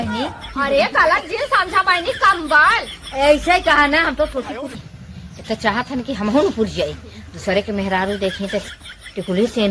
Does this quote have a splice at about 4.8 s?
yes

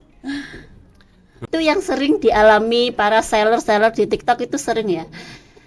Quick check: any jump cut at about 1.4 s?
yes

